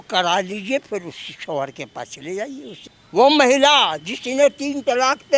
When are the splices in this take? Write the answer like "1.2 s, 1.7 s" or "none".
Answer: 2.8 s